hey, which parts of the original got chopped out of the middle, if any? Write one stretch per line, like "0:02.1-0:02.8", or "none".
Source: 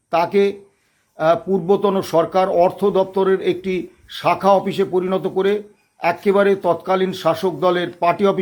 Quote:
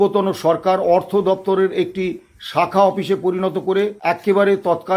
0:05.6-0:05.9